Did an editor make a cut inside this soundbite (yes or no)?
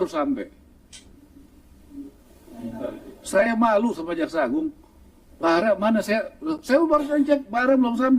yes